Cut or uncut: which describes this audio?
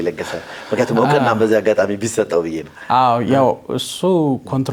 uncut